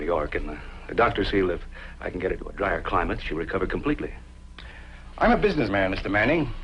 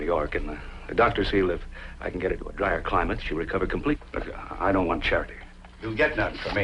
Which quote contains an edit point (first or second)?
first